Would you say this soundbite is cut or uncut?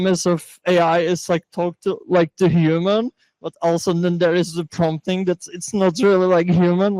uncut